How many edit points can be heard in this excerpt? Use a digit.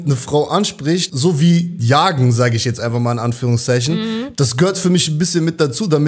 1